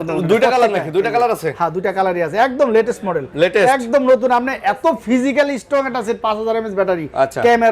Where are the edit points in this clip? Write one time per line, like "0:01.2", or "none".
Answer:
none